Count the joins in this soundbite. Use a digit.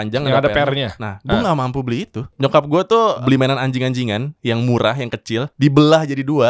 3